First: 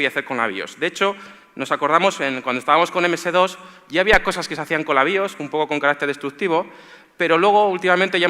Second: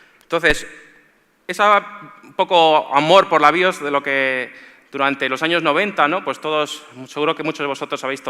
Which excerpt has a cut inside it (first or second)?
first